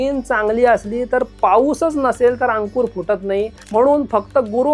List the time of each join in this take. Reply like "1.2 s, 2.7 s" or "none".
3.6 s